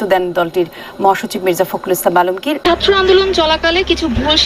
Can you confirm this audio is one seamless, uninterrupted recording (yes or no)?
no